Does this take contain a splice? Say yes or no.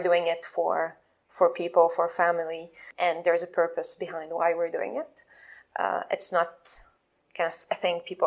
yes